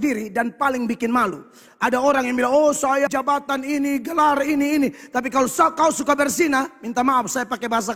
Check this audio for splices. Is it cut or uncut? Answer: cut